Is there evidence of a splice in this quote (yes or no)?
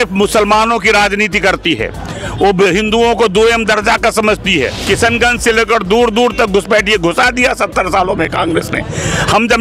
yes